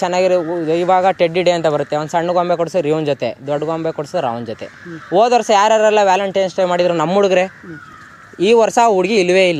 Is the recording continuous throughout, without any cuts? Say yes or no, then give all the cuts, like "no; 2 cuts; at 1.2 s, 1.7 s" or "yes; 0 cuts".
yes; 0 cuts